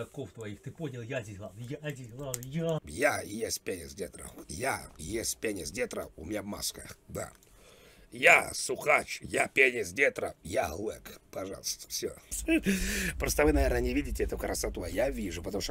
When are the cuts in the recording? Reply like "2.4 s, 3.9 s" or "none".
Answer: 2.9 s, 12.4 s